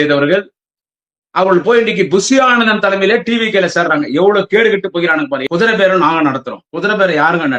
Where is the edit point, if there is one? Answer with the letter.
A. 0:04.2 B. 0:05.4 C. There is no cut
B